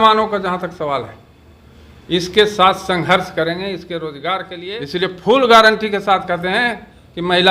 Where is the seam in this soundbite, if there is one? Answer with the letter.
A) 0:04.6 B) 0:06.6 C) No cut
A